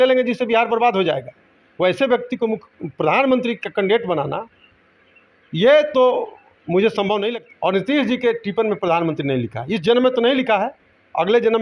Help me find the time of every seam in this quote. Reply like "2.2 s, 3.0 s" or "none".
7.3 s